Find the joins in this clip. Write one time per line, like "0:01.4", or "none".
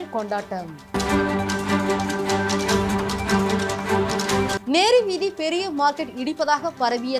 none